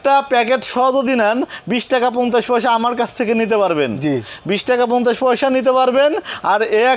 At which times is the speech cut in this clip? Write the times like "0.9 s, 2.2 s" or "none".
none